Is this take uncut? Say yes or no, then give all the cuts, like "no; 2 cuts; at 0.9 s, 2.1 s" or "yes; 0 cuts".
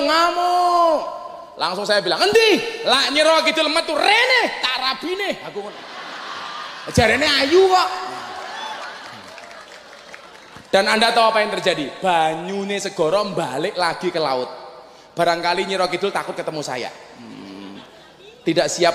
yes; 0 cuts